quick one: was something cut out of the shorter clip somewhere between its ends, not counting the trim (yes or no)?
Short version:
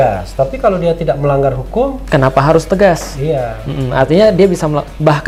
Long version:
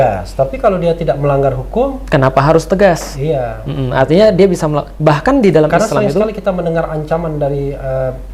no